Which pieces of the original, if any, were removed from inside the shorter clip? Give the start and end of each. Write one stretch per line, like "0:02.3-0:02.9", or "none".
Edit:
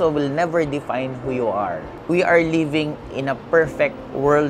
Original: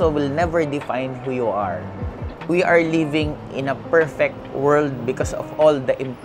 0:01.9-0:02.3